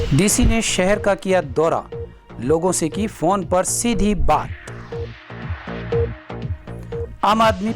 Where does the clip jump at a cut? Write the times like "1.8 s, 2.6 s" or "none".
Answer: 4.6 s